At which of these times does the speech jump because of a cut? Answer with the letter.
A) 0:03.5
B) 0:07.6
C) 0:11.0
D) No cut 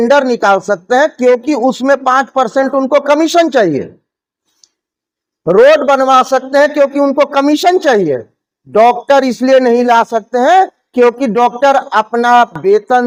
D